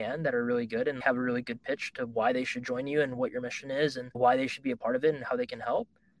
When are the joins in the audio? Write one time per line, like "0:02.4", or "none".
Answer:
0:01.0